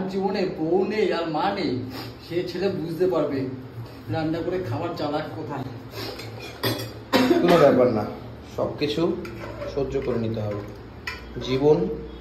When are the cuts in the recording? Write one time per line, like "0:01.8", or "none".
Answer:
none